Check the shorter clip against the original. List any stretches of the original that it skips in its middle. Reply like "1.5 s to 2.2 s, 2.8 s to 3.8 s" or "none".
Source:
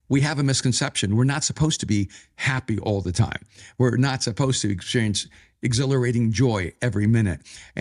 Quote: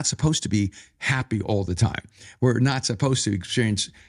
none